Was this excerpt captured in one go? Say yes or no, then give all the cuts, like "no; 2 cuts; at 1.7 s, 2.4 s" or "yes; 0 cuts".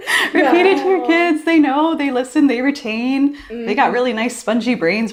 yes; 0 cuts